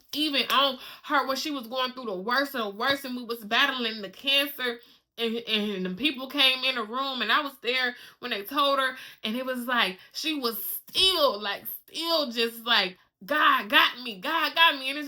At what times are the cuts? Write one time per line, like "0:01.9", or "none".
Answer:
none